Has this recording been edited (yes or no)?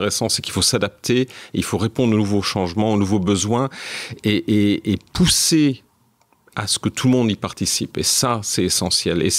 no